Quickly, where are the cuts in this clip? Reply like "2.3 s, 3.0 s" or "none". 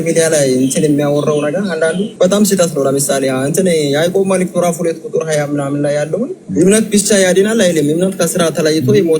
2.1 s, 6.4 s